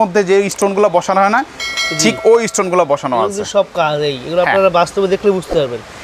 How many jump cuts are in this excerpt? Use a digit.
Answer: 0